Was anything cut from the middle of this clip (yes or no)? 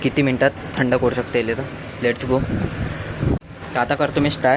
no